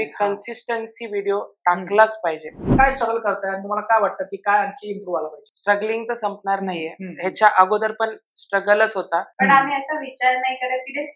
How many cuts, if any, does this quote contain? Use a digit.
2